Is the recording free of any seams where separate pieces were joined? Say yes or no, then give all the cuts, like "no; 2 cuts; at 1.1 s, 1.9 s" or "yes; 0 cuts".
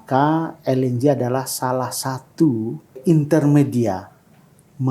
no; 1 cut; at 3.0 s